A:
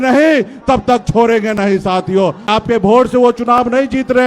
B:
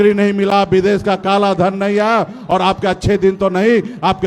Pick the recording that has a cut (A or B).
A